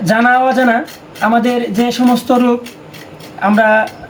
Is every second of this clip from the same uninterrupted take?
yes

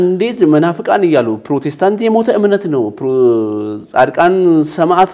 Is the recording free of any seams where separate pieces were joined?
yes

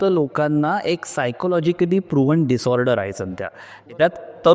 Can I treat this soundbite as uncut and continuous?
yes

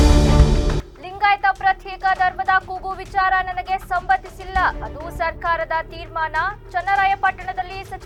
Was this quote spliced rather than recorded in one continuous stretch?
no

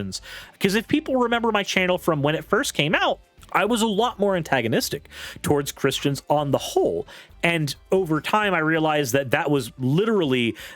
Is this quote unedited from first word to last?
no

